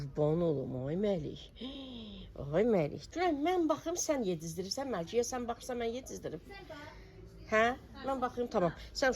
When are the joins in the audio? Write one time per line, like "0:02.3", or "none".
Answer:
0:03.0